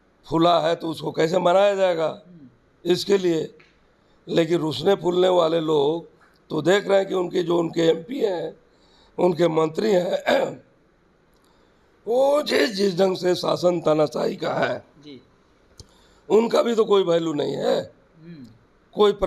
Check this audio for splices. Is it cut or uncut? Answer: uncut